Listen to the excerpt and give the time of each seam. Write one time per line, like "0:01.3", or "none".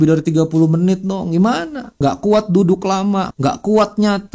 0:01.9
0:03.3